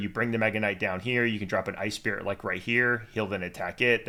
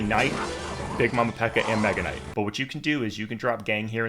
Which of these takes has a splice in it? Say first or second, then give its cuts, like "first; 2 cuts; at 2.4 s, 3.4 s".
second; 1 cut; at 2.2 s